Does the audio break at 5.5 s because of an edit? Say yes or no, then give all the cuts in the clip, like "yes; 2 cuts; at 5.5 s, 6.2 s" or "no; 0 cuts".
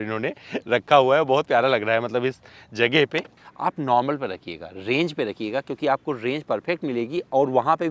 no; 1 cut; at 3.3 s